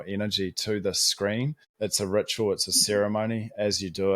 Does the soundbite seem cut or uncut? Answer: cut